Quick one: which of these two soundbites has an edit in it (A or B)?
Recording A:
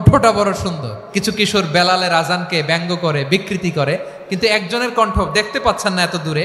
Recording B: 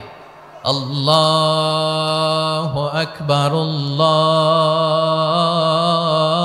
A